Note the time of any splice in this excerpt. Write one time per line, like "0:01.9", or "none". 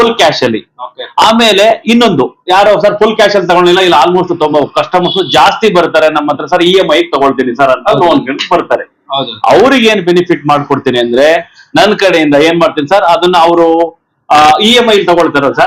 none